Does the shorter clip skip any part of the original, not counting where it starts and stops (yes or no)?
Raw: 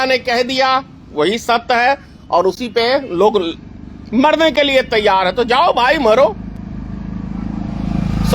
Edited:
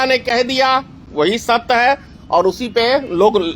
no